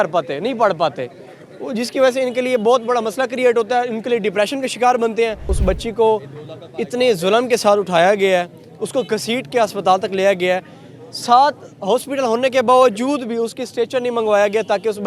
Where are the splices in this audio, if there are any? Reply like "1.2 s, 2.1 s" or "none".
5.5 s